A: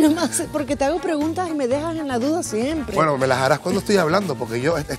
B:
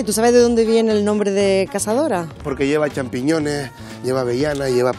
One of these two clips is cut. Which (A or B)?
B